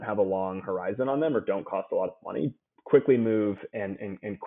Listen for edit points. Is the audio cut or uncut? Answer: cut